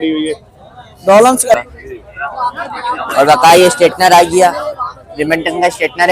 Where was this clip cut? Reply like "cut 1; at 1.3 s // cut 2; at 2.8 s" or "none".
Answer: cut 1; at 1.6 s

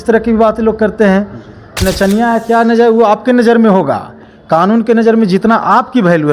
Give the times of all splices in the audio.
cut 1; at 1.8 s

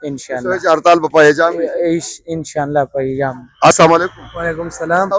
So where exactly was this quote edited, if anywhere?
none

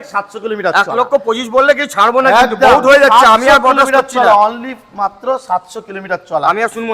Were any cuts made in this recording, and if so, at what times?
none

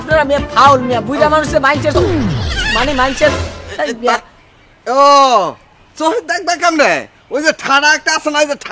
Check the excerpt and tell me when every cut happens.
none

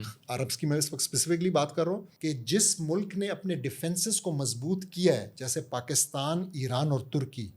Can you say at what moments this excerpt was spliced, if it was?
cut 1; at 2.1 s

